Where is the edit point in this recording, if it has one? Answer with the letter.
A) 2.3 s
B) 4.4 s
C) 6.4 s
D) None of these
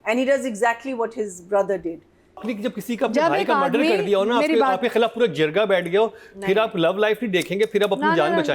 A